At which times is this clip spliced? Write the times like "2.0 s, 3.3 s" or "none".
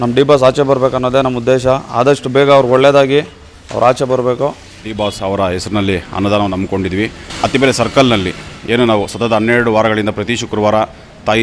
4.6 s, 7.2 s